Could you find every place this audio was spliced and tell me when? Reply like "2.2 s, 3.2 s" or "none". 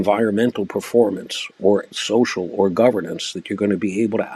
none